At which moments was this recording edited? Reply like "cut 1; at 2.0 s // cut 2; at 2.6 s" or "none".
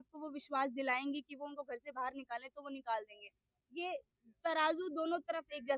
none